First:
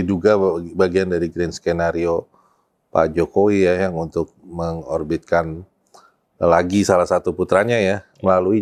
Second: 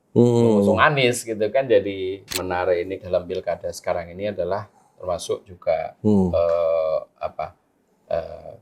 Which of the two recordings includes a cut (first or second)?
second